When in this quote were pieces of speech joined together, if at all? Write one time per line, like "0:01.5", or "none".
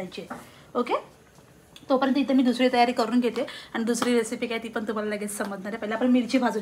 none